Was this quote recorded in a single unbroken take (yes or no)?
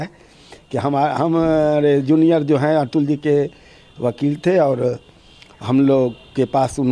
yes